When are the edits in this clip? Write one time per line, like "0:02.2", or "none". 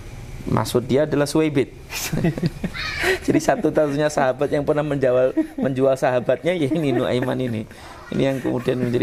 none